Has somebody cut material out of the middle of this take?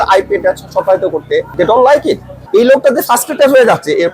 yes; 2 cuts; at 1.5 s, 2.3 s

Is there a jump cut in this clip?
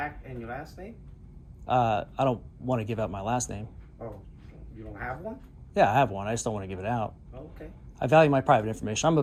no; 0 cuts

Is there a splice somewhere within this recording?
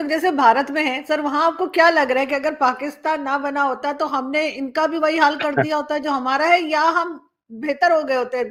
no; 0 cuts

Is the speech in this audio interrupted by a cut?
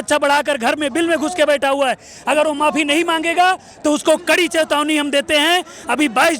no; 0 cuts

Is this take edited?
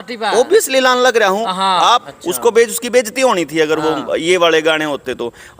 yes; 1 cut; at 2.2 s

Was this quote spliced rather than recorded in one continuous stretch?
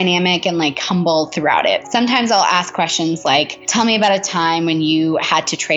yes; 1 cut; at 1.8 s

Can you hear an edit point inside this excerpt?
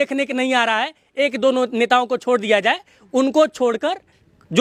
no; 0 cuts

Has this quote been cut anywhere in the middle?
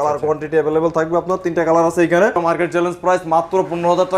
yes; 1 cut; at 2.4 s

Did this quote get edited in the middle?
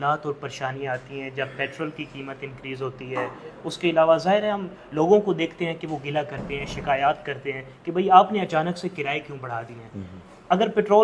no; 0 cuts

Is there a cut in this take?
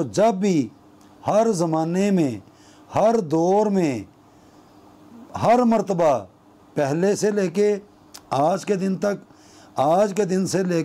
no; 0 cuts

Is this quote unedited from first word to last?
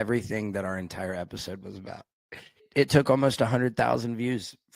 no; 1 cut; at 2.6 s

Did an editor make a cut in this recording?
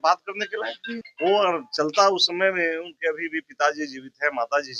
yes; 1 cut; at 1.0 s

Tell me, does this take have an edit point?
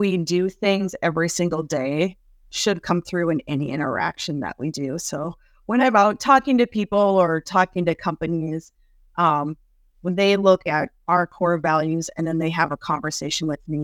no; 0 cuts

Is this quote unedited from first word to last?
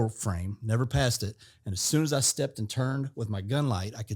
yes; 0 cuts

